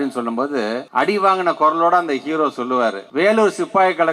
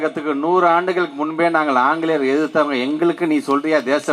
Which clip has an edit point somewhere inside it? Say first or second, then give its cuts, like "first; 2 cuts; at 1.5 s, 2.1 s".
first; 2 cuts; at 0.8 s, 3.0 s